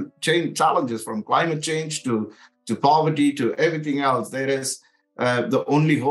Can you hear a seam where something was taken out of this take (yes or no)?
no